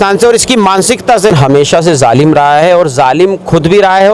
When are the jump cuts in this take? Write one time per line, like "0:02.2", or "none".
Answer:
0:01.3